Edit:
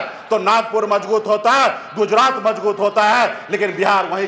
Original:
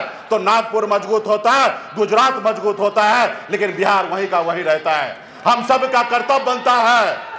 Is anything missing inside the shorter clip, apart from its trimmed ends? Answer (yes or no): no